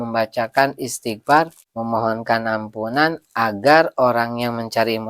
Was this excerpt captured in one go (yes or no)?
no